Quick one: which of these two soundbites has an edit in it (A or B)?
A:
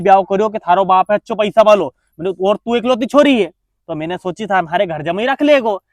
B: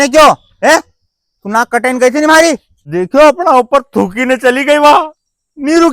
B